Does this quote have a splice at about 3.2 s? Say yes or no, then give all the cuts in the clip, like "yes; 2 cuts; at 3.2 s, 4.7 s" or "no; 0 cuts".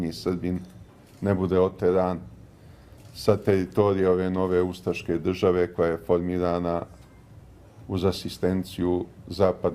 no; 1 cut; at 5.6 s